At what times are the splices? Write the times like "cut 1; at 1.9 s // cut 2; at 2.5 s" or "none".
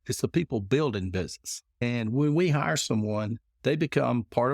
cut 1; at 1.8 s // cut 2; at 3.4 s